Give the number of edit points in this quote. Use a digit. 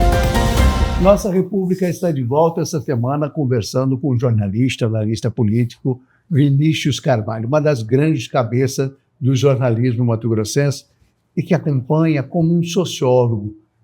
1